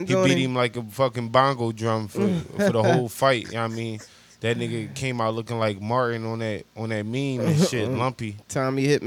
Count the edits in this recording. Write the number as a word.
zero